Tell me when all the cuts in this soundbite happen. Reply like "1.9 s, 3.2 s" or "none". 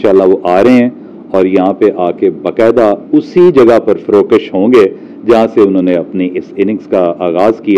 none